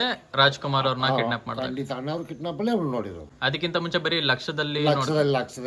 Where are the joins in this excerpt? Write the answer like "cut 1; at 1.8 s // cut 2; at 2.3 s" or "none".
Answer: none